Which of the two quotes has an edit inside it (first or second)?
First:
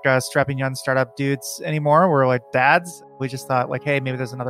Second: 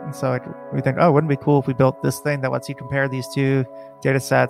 first